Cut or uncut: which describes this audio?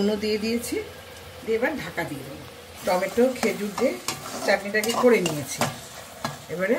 uncut